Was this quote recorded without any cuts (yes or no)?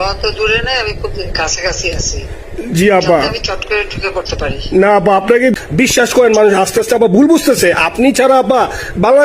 no